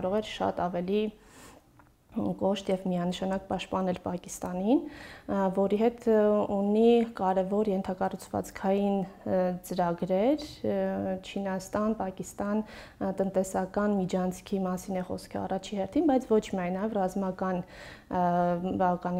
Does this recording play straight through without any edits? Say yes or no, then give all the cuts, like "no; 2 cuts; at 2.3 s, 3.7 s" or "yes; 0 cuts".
yes; 0 cuts